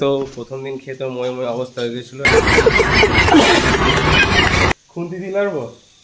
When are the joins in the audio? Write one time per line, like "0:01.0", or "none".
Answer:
0:04.9